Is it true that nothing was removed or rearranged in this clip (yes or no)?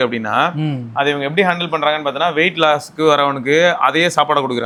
yes